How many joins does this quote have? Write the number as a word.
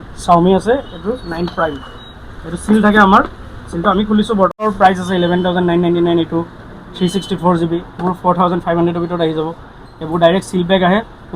one